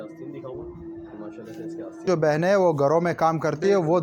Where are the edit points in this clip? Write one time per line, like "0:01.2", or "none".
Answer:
0:02.0